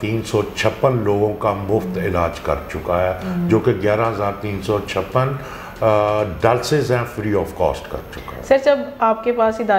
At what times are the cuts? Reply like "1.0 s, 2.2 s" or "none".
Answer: none